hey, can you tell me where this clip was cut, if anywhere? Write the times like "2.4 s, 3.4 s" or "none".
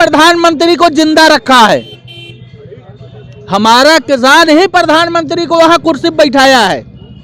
none